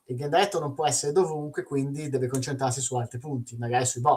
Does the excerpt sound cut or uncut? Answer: uncut